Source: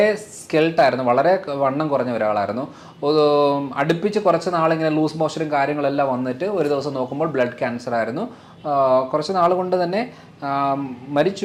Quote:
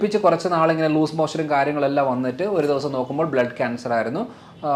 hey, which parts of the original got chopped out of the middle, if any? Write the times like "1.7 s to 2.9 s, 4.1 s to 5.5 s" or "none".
none